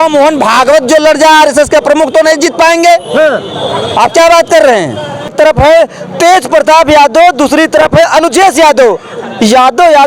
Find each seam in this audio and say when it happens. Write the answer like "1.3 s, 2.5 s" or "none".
5.3 s